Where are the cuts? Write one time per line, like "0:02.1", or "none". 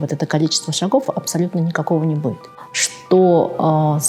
0:02.4